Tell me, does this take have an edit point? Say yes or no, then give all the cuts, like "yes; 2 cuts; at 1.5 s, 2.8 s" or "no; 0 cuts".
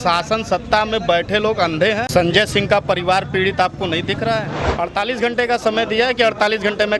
yes; 2 cuts; at 2.1 s, 4.6 s